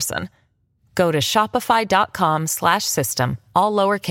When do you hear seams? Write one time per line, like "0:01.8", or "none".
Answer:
none